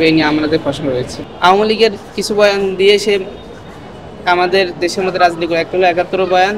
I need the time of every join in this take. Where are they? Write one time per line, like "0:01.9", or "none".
none

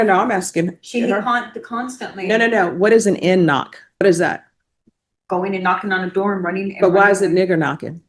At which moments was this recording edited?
0:04.0

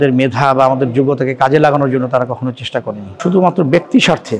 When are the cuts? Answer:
0:03.2

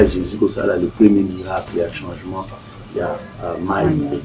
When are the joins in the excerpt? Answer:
none

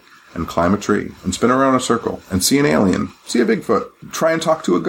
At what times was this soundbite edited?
0:04.0

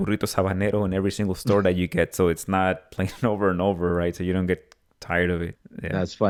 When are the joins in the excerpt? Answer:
none

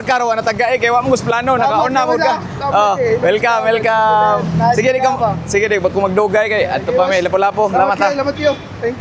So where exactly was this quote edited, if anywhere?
none

